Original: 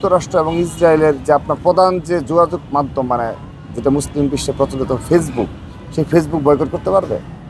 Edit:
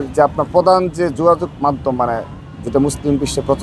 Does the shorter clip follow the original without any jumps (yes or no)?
yes